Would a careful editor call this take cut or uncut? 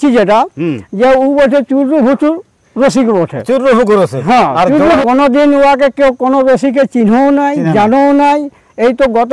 cut